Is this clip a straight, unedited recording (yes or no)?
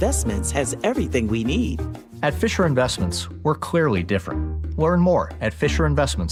yes